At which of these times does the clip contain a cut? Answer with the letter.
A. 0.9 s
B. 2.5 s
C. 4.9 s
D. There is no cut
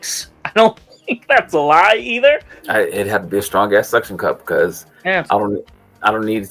B